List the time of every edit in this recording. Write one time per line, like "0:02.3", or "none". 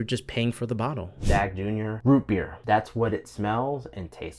0:01.6
0:02.5